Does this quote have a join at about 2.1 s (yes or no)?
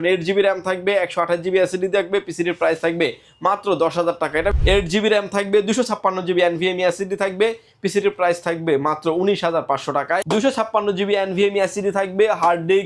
no